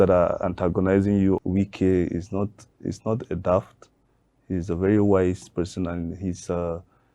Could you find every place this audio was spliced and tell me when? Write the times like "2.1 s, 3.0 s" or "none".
1.4 s